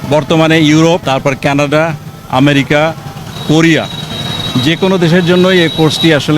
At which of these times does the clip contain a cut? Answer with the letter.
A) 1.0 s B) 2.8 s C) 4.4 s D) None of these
A